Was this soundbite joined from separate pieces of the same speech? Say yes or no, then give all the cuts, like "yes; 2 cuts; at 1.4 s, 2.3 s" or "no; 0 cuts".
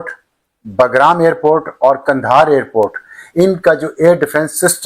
no; 0 cuts